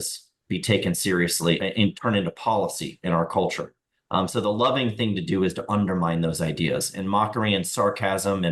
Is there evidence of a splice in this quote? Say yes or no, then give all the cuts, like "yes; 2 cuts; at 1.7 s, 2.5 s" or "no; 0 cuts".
yes; 1 cut; at 1.6 s